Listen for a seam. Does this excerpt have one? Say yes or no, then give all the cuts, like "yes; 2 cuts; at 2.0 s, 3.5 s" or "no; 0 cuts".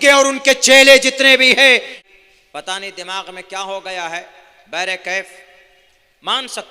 yes; 1 cut; at 1.9 s